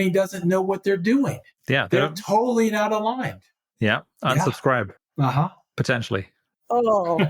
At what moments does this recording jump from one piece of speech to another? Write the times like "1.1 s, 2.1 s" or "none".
6.2 s